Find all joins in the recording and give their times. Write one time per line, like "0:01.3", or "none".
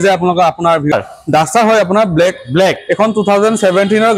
0:00.9